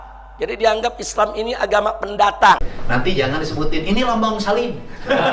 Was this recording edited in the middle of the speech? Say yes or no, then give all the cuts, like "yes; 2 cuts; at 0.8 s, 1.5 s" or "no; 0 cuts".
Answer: yes; 1 cut; at 2.7 s